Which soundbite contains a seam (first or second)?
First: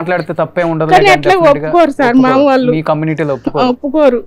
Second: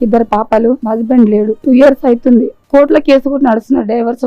second